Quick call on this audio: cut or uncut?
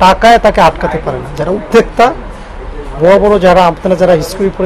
uncut